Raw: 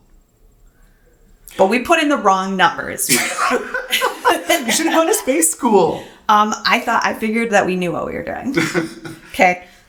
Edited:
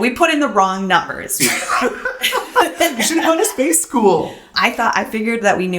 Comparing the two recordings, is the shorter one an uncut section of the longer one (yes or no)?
no